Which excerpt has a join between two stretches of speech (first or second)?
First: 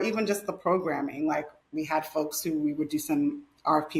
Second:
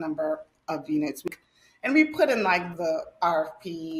second